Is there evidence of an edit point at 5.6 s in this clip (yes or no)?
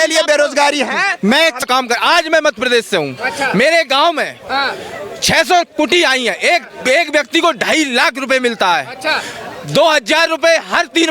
no